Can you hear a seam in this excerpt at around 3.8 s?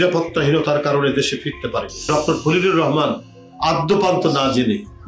no; 1 cut; at 2.1 s

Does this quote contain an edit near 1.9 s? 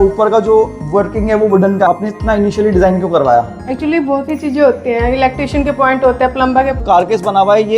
yes; 2 cuts; at 1.9 s, 6.8 s

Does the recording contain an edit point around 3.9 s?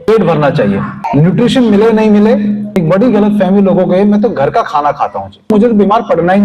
no; 3 cuts; at 1.0 s, 2.7 s, 5.5 s

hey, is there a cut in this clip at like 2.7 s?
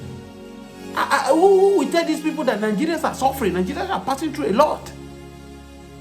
no; 2 cuts; at 1.0 s, 4.8 s

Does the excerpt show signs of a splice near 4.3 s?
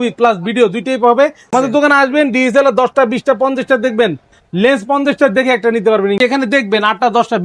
no; 2 cuts; at 1.4 s, 6.2 s

